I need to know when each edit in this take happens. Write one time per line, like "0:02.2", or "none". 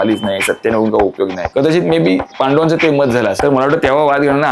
0:01.4
0:02.3
0:03.4